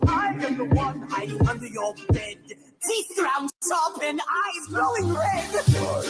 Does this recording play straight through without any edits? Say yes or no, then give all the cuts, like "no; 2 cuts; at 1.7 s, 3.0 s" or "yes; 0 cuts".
yes; 0 cuts